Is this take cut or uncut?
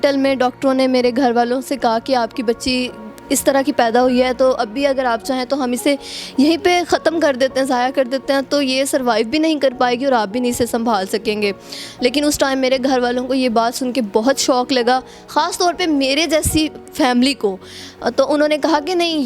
uncut